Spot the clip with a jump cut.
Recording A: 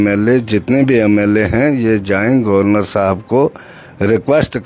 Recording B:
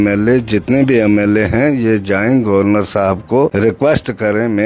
B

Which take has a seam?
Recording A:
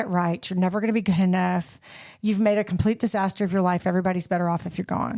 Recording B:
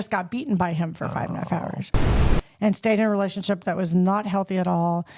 B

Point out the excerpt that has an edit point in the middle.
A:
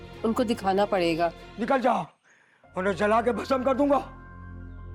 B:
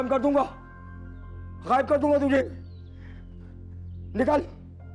A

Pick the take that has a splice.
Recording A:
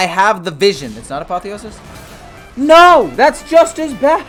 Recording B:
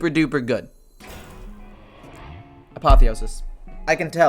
B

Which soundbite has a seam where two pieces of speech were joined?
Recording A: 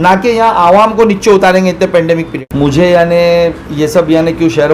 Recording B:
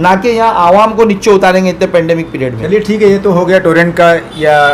A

